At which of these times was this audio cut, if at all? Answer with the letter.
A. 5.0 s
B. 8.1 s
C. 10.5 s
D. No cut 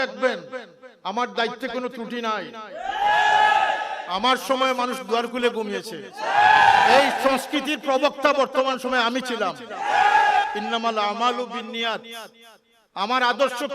C